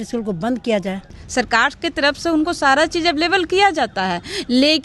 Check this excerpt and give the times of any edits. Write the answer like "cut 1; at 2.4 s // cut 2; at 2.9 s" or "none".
cut 1; at 1.2 s